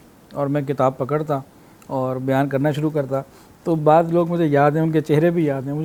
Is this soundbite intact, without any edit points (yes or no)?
yes